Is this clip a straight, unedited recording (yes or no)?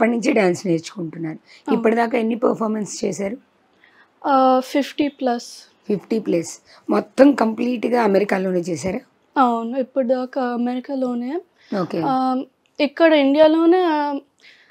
yes